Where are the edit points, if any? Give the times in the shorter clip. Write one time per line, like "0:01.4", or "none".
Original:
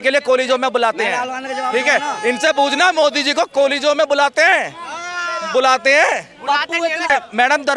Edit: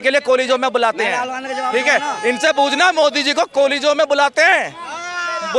none